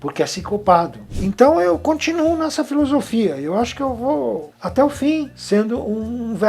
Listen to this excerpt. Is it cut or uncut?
cut